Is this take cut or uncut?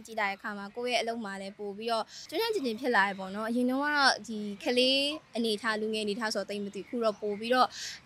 cut